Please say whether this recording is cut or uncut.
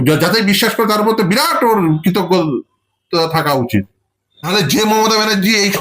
cut